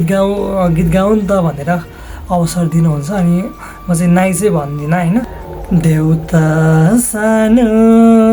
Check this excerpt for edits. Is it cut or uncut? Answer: cut